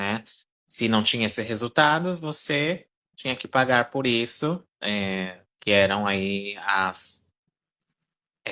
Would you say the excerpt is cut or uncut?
uncut